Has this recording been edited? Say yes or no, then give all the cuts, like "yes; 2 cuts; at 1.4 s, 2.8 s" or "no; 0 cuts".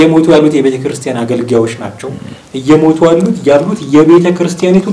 no; 0 cuts